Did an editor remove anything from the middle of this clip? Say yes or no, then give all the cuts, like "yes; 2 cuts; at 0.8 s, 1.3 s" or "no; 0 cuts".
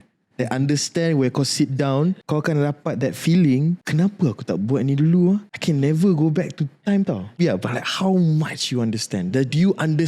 yes; 4 cuts; at 2.2 s, 3.8 s, 5.5 s, 7.4 s